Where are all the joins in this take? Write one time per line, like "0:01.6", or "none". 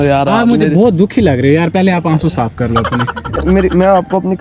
0:03.4

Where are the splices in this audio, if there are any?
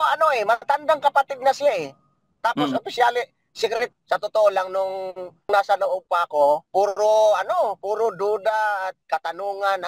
0:03.9
0:05.5
0:06.7
0:09.0

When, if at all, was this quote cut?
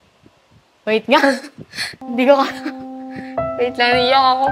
none

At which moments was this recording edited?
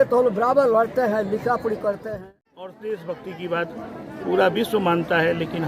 0:02.0

